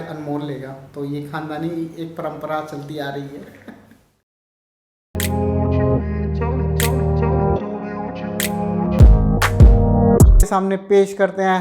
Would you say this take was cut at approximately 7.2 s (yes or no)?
no